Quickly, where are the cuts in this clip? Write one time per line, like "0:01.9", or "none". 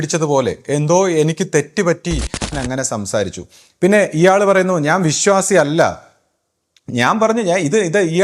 0:02.5